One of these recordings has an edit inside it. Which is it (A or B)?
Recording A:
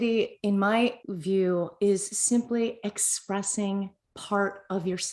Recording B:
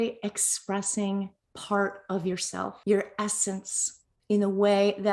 A